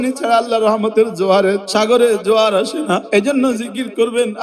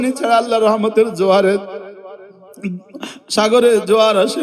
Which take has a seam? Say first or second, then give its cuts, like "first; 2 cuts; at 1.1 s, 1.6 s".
first; 2 cuts; at 1.6 s, 3.0 s